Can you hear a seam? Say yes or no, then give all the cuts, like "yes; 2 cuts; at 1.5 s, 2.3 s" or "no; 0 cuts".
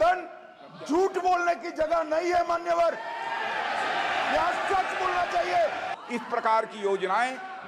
yes; 1 cut; at 5.9 s